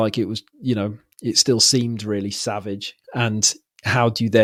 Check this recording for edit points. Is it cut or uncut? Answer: uncut